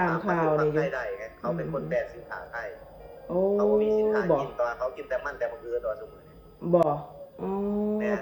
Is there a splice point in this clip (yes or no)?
no